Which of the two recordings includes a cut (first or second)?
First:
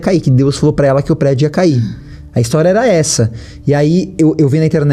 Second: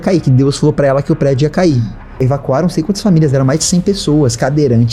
second